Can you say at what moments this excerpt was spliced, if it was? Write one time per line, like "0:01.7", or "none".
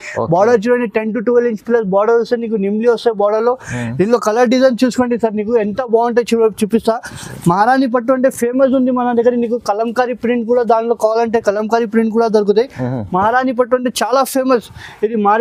none